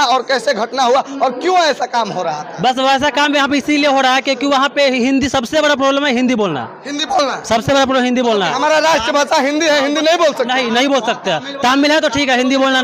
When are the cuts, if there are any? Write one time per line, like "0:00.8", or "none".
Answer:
none